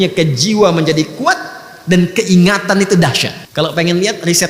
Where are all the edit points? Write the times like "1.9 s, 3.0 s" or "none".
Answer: 3.4 s